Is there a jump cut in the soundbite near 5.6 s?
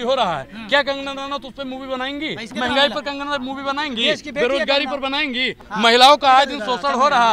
yes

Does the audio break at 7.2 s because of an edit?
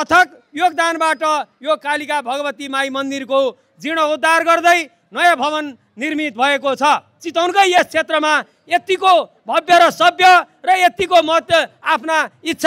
yes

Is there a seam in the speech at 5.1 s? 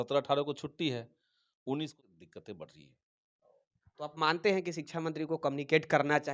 no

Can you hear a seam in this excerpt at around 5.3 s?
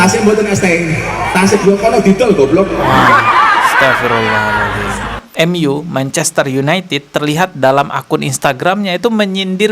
yes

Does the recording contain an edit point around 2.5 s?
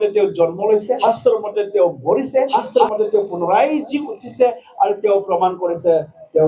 yes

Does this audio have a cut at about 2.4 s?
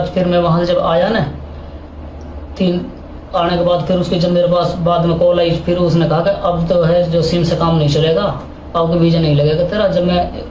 no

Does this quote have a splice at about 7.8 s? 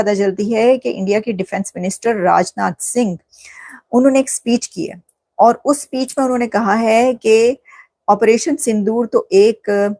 no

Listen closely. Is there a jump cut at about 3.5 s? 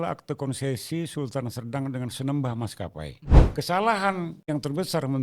yes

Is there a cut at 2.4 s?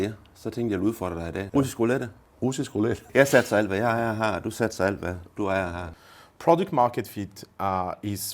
yes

